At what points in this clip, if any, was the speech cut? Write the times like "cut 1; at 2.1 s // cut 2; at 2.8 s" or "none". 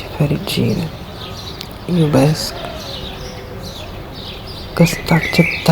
cut 1; at 2.9 s // cut 2; at 4.7 s